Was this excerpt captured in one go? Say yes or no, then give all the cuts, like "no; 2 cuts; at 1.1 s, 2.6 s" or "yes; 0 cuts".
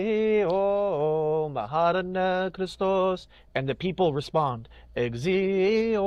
yes; 0 cuts